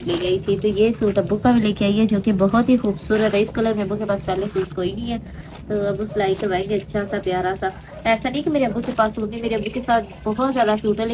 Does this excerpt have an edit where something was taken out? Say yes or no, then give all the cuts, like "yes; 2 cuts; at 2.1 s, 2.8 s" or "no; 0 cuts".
no; 0 cuts